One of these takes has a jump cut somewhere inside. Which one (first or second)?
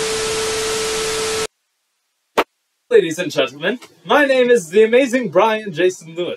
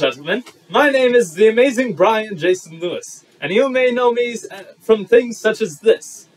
first